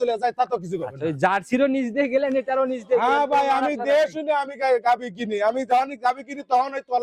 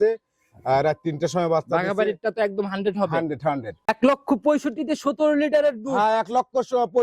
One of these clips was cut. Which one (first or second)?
second